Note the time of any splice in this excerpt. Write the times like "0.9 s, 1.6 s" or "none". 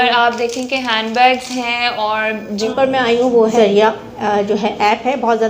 2.7 s